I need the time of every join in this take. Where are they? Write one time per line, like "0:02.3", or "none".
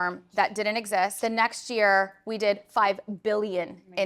0:01.1